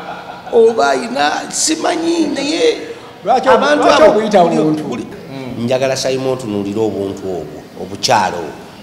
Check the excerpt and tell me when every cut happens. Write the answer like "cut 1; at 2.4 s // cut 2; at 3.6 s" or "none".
cut 1; at 5.2 s